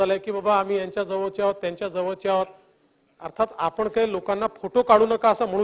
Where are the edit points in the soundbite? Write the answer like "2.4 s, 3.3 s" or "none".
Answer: none